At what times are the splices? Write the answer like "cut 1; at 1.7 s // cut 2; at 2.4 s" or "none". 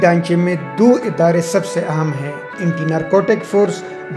cut 1; at 2.6 s